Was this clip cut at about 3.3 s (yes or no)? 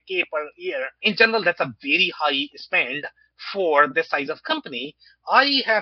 no